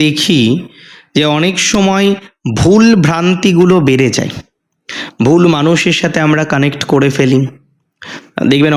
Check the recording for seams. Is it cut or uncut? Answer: uncut